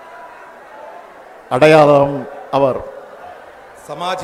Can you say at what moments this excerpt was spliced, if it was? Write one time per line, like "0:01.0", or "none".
none